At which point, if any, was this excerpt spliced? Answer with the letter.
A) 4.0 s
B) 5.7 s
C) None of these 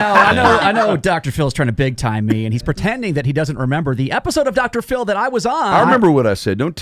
B